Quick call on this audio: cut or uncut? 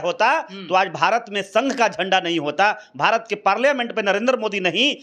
uncut